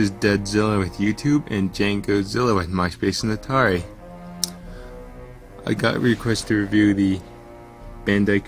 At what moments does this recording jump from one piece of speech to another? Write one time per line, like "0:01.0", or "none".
none